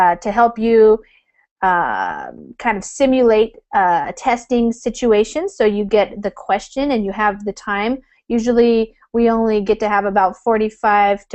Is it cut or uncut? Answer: uncut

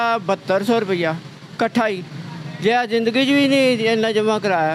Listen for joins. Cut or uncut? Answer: uncut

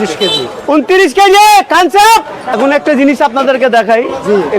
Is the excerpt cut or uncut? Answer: cut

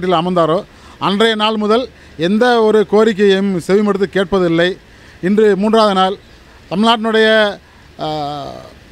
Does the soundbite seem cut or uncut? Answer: uncut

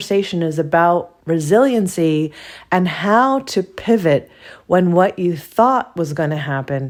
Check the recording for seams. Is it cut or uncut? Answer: uncut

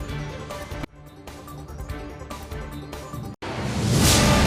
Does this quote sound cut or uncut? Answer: uncut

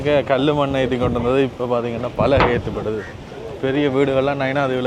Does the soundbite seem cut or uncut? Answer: uncut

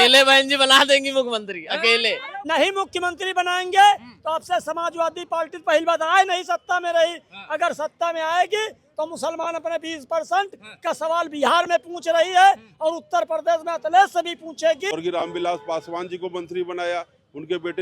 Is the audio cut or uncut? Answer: cut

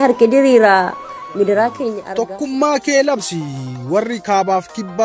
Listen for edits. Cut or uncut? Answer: cut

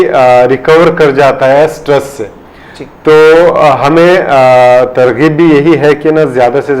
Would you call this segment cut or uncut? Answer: uncut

